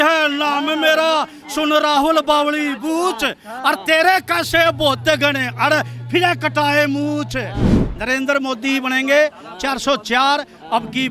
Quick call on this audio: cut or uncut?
uncut